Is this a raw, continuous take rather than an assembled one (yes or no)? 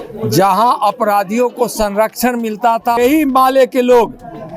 no